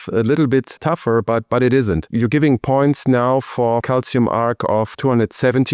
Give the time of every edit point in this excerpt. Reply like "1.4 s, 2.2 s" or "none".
2.1 s, 3.8 s, 4.9 s